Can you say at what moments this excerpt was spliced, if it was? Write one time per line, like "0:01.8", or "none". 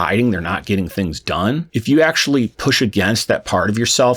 0:01.7